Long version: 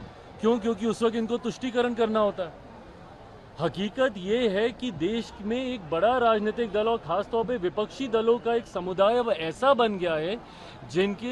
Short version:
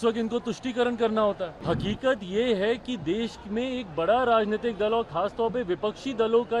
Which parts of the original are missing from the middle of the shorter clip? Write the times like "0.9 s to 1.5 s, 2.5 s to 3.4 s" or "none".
2.5 s to 3.5 s

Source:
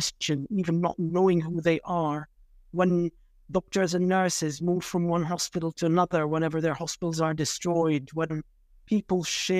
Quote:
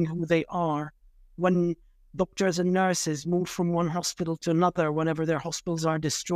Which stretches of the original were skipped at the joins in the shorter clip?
none

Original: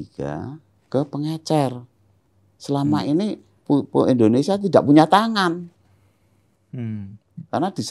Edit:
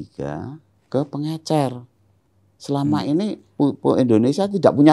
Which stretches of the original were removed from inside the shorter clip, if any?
3.4 s to 3.5 s

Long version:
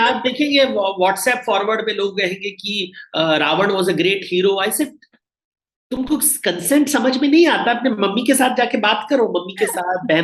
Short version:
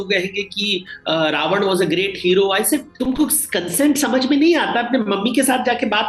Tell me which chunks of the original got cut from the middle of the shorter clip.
5.0 s to 5.8 s

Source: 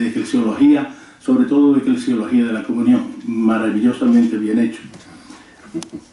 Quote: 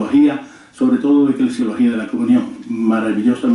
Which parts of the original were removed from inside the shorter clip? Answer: 2.3 s to 2.4 s

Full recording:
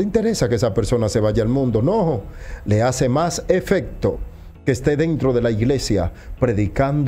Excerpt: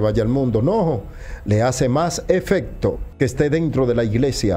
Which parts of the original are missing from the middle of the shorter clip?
4.3 s to 4.5 s

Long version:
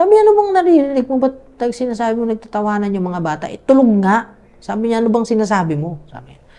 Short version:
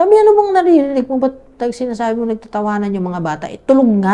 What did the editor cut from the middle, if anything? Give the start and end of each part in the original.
none

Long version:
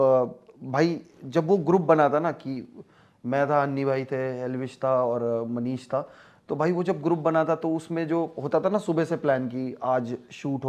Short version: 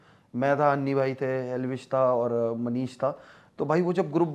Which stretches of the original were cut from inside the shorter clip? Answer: none

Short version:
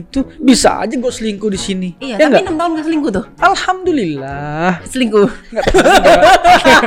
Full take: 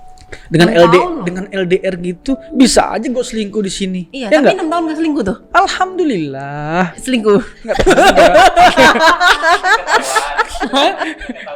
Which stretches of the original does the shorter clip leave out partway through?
none

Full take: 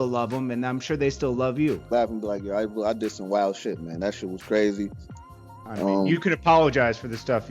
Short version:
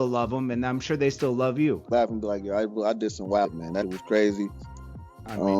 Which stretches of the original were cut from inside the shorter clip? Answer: 3.7 s to 4.1 s

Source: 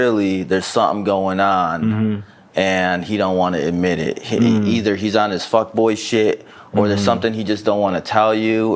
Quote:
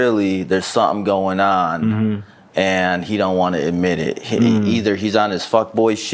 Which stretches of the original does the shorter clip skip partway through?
none

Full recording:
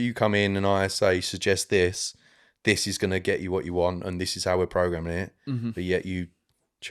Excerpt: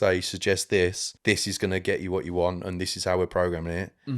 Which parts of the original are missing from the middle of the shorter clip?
2.1 s to 2.5 s

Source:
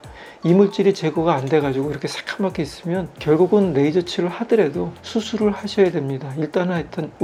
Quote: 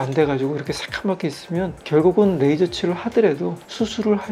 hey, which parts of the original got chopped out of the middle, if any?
none

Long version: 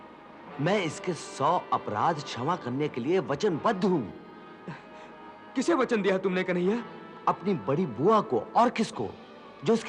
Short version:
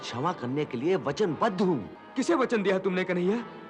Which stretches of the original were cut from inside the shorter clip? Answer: 4.2 s to 5.4 s

